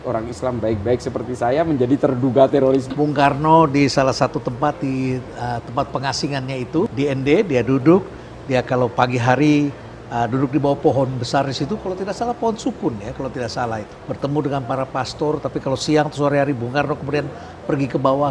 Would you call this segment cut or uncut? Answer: cut